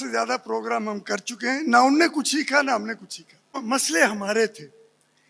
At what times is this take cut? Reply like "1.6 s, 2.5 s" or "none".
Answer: 3.6 s